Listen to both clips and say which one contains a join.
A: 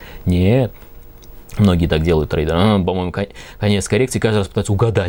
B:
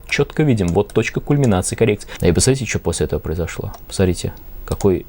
B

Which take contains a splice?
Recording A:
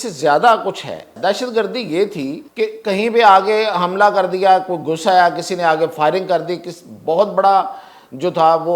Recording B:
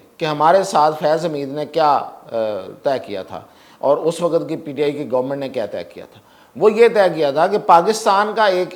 A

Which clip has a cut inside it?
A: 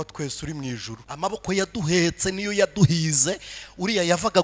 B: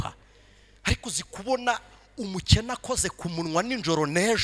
A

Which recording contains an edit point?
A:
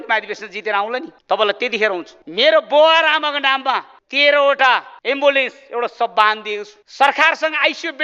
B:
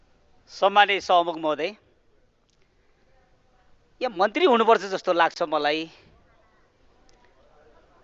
A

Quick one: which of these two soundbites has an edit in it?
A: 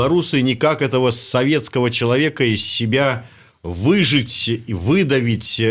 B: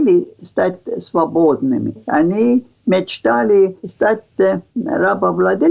B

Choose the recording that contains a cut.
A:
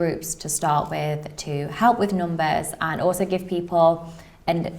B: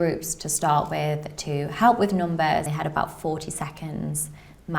B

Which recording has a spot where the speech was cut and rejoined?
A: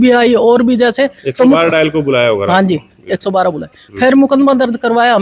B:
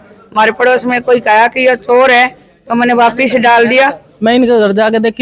B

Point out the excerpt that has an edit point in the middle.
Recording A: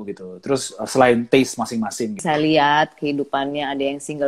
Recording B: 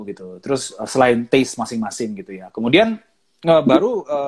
A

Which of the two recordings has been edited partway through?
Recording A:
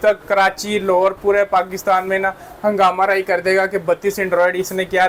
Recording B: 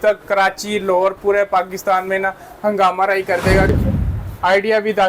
B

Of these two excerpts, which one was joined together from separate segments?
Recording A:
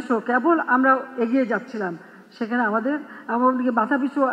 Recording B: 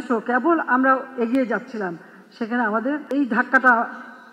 B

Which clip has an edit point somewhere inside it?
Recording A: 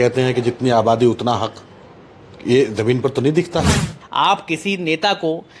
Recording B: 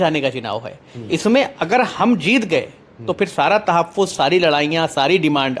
A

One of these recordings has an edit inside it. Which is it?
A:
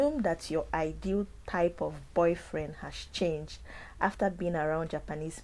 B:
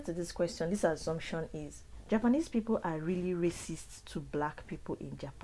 B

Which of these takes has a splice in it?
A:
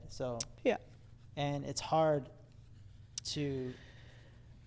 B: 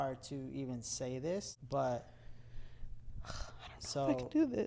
B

